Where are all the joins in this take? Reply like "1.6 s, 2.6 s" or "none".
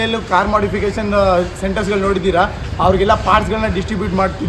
none

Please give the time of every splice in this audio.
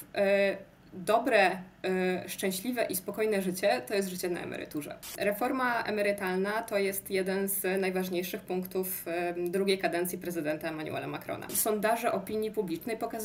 5.1 s, 11.5 s

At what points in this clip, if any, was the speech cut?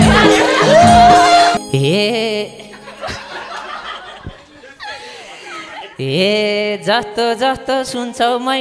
1.6 s

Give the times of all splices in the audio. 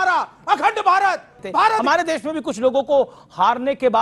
1.8 s

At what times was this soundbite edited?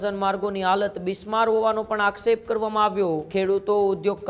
3.2 s

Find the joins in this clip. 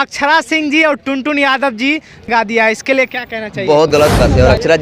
2.3 s, 3.9 s

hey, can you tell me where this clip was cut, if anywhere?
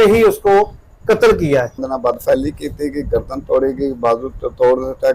1.9 s

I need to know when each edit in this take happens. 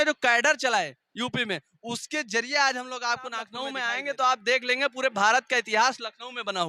3.6 s

